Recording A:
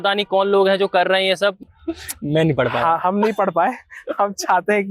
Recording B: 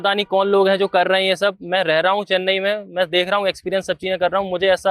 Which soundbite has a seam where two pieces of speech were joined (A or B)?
A